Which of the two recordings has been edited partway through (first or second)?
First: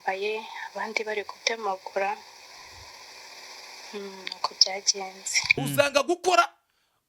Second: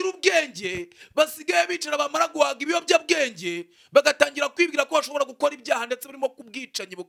first